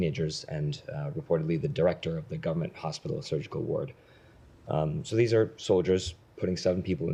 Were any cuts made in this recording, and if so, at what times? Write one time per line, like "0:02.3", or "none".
none